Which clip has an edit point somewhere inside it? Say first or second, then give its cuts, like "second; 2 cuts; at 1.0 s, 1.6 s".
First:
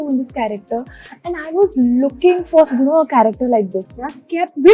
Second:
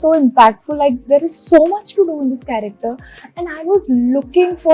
first; 1 cut; at 3.8 s